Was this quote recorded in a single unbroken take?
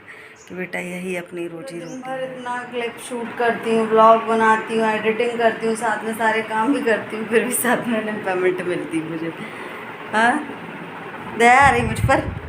no; 1 cut; at 1.9 s

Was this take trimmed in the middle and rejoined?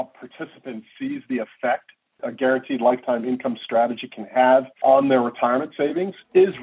yes; 1 cut; at 2.2 s

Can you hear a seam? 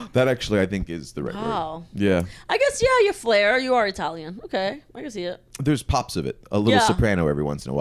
yes; 1 cut; at 5.5 s

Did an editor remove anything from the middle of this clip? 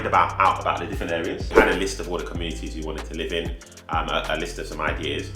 yes; 1 cut; at 1.4 s

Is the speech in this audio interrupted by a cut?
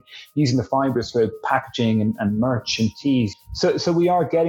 yes; 1 cut; at 3.3 s

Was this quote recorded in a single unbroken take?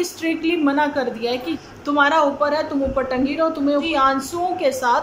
no; 2 cuts; at 1.5 s, 3.9 s

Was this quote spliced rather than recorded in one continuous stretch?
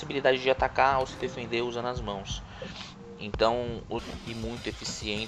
no; 0 cuts

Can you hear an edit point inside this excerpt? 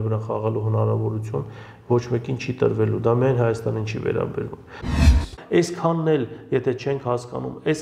yes; 1 cut; at 5.0 s

